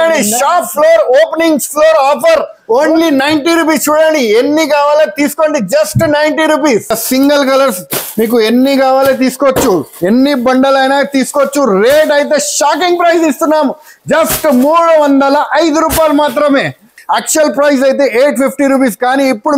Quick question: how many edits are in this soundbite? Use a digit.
2